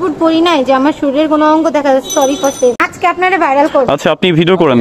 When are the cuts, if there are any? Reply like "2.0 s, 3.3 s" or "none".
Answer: 2.9 s